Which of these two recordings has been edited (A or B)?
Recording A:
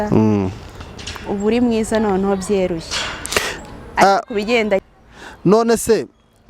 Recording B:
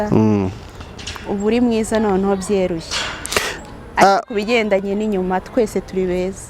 A